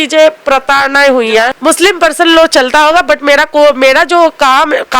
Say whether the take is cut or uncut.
cut